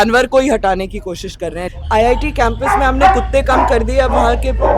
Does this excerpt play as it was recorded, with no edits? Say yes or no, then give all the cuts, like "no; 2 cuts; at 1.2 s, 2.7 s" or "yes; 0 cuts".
no; 1 cut; at 1.6 s